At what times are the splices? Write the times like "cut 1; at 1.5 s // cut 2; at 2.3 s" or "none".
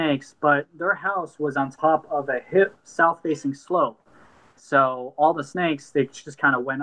none